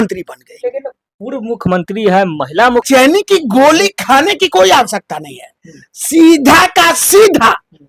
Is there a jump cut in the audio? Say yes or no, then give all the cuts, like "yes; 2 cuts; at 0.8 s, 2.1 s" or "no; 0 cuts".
yes; 1 cut; at 2.9 s